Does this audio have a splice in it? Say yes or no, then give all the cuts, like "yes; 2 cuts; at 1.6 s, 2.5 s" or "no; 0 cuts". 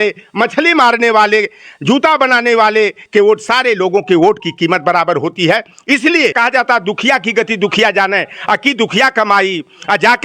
yes; 1 cut; at 6.3 s